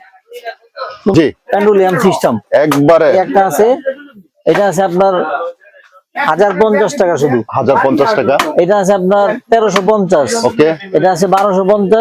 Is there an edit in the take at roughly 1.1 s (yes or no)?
yes